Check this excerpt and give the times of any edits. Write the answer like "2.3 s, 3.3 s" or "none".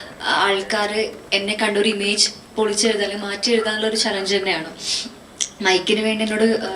none